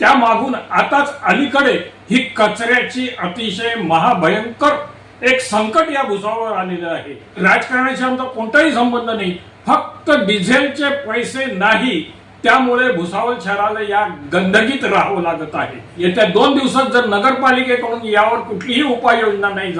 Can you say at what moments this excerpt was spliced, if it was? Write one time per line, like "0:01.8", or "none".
0:07.2
0:15.8

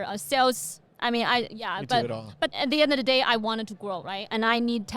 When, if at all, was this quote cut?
0:02.5

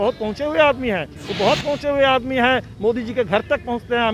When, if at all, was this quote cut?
0:01.2

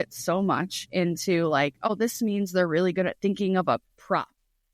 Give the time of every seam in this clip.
0:01.9

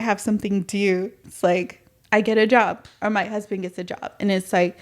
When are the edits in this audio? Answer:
none

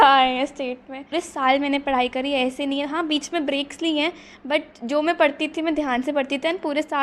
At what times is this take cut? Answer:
0:01.1

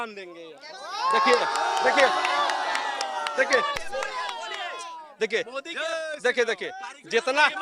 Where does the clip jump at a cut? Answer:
none

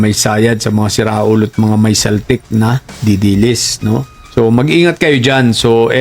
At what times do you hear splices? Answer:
0:04.2

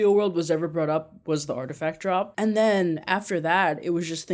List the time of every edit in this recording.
0:02.3

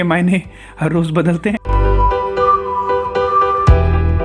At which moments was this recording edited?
0:01.6

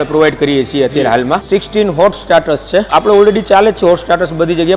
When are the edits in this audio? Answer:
0:01.4
0:02.9

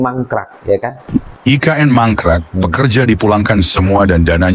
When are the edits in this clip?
0:01.1

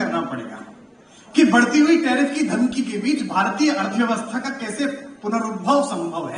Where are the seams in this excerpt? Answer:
none

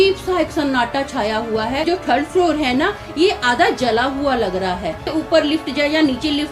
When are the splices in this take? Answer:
0:01.8
0:05.1

